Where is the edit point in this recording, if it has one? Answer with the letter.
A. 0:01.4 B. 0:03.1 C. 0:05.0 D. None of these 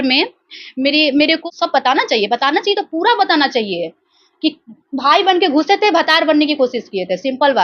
A